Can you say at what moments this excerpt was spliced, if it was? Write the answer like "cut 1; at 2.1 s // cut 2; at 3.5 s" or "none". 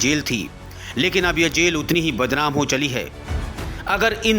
cut 1; at 3.5 s